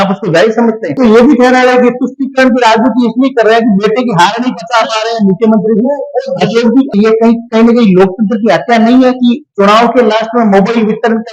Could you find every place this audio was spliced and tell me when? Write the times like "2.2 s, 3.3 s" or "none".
1.0 s, 6.9 s